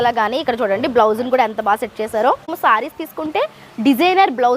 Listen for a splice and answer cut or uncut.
cut